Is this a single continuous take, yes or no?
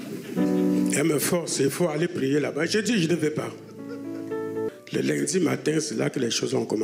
no